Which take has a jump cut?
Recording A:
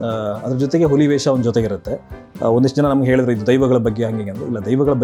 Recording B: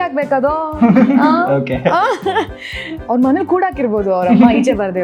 B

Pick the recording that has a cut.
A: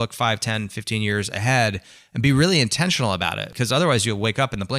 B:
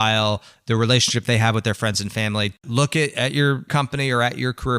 B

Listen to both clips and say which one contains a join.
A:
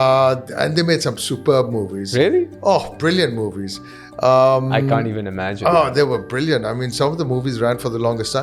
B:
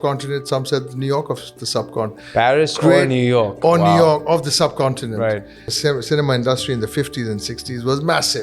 B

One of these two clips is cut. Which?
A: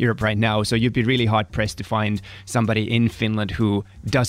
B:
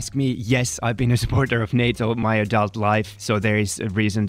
B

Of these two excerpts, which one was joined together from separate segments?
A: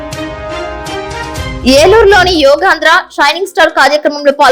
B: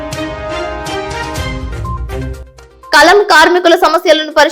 A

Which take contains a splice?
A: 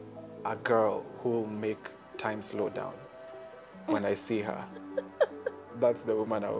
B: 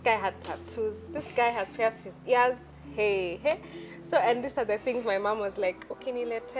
A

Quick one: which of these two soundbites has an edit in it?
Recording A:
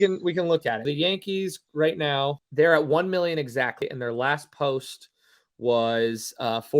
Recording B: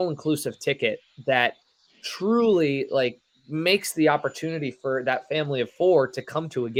A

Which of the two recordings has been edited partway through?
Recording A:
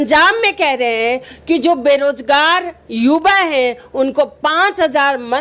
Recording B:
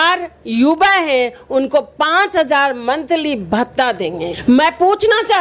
B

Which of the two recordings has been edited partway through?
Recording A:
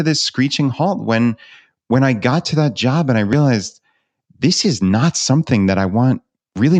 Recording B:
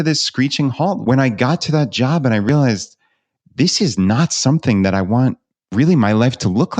B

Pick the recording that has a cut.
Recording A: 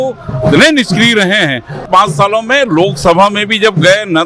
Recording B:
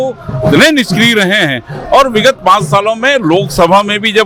A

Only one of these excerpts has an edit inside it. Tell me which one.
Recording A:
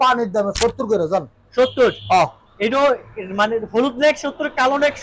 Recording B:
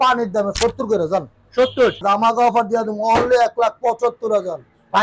B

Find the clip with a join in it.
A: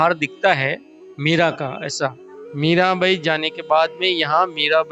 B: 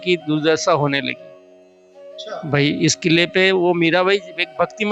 A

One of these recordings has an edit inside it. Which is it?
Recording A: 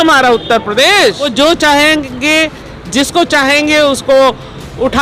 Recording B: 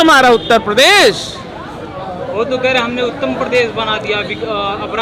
A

